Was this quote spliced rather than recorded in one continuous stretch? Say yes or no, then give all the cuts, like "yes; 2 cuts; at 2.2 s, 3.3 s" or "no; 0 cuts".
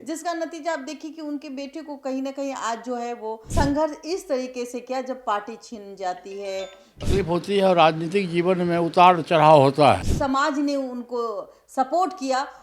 yes; 3 cuts; at 3.4 s, 6.9 s, 10.1 s